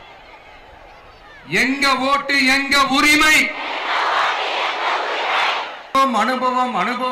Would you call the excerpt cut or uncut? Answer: cut